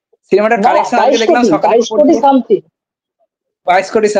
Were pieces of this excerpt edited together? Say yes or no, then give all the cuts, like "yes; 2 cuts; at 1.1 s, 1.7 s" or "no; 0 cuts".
no; 0 cuts